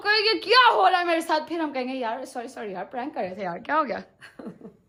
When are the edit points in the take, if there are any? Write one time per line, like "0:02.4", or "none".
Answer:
none